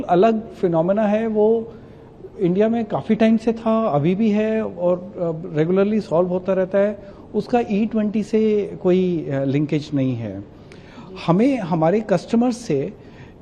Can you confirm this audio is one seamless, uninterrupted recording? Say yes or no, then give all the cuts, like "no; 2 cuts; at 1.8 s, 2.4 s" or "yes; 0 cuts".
yes; 0 cuts